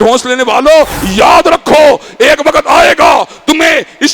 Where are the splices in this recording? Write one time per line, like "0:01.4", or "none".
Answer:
0:01.0